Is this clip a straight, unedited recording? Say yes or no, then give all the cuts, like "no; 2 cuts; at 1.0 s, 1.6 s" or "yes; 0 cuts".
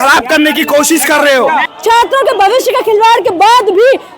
no; 1 cut; at 1.7 s